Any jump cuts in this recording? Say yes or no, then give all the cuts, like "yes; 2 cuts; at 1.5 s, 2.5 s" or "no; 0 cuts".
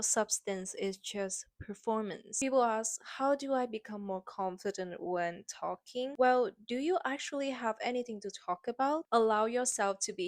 yes; 2 cuts; at 2.2 s, 9.0 s